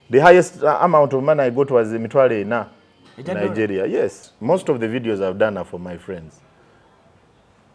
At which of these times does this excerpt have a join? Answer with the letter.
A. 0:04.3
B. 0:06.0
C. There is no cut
A